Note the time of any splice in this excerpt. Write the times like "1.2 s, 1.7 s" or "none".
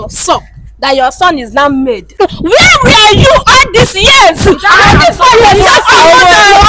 2.1 s